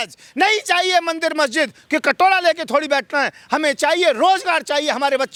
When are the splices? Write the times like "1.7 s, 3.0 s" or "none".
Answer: none